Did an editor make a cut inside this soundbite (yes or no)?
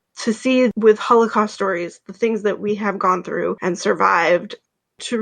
no